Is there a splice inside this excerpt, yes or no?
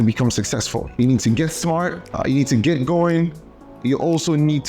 yes